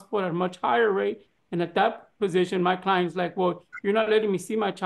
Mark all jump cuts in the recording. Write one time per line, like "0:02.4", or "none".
none